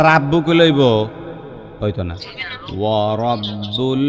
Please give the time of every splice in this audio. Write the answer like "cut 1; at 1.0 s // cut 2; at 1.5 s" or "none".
none